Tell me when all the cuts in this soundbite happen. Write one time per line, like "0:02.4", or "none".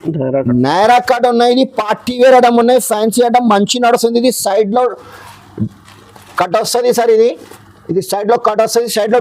none